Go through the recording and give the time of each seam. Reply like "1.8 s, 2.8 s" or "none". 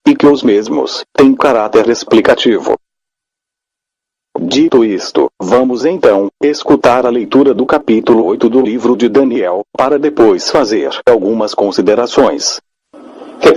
2.6 s